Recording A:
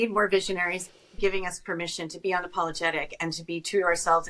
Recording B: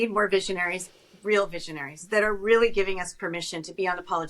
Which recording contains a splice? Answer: A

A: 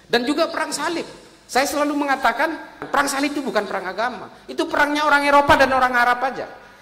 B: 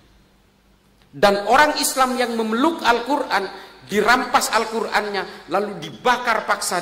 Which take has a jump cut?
A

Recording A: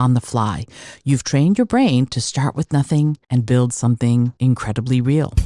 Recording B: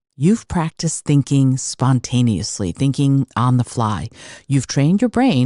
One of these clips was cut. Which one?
A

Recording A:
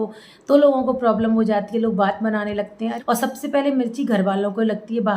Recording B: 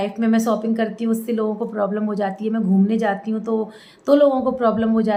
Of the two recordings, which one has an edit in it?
A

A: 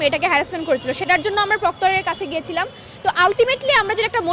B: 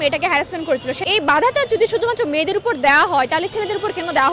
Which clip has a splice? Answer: B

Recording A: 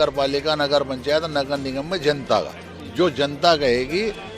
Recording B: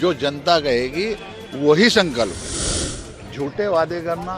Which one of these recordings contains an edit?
B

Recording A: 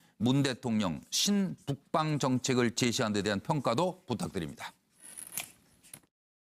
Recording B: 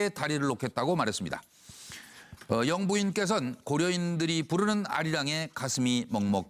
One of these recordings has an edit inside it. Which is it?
B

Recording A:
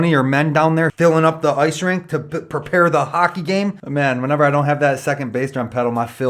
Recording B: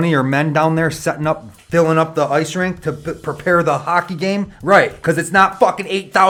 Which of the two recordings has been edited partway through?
A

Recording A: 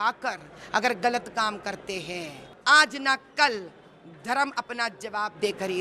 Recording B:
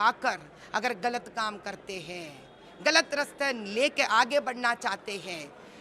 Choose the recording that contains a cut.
A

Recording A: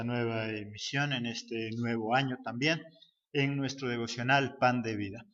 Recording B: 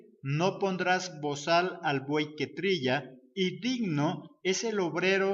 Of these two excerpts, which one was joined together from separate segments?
B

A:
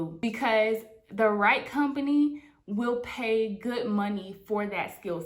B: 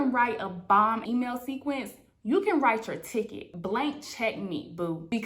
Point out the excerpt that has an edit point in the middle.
B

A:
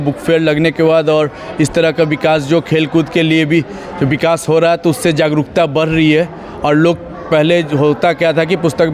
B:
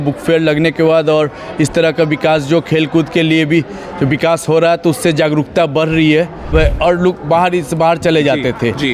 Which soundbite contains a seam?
B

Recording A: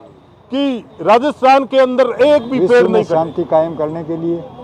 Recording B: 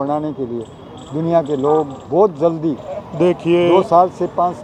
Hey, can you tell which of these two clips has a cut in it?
A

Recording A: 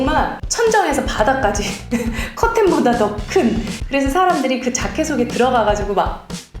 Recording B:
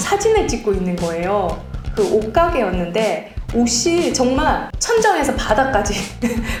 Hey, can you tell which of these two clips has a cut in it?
A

